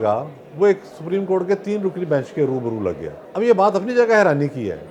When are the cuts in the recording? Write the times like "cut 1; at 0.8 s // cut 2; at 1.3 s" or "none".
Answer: cut 1; at 3.2 s